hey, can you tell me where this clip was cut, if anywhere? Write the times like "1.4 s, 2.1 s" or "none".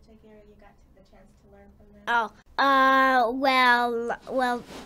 2.4 s